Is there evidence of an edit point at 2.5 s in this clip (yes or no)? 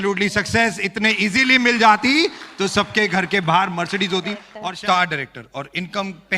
no